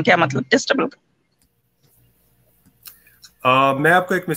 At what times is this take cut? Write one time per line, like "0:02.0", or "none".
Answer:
none